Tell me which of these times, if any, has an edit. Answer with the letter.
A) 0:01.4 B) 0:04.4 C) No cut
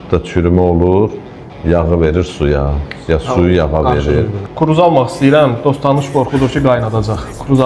B